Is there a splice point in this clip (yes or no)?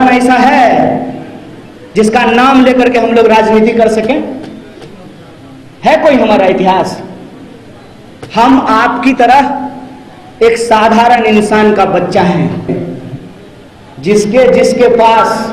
yes